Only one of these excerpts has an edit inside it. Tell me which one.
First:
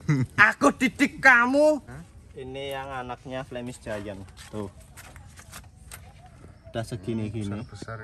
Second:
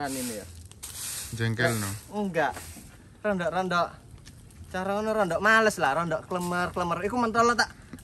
first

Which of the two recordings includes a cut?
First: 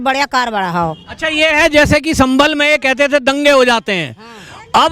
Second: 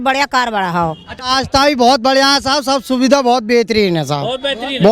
second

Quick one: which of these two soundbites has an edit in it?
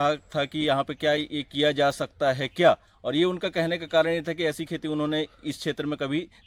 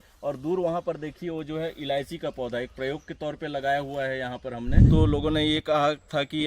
second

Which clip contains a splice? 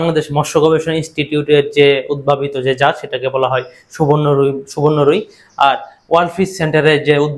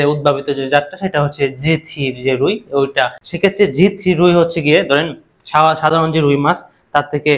second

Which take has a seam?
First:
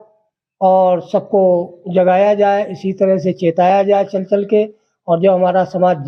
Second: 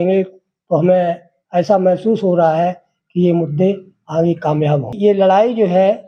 second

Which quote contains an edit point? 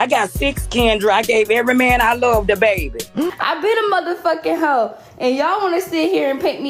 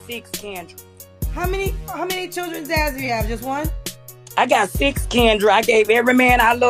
first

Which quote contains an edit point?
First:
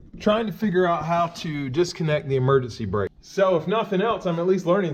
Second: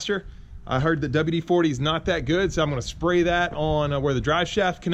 first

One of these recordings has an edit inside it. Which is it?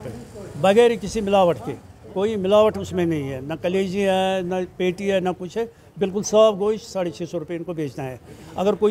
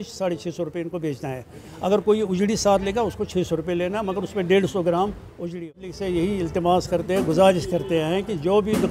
second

